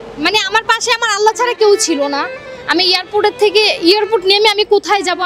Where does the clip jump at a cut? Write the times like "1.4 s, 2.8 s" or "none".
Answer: none